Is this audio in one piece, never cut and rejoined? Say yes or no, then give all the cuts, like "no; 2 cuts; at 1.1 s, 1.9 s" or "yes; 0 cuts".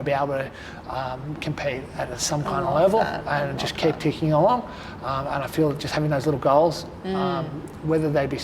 yes; 0 cuts